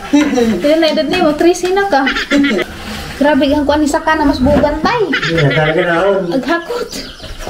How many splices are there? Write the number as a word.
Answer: one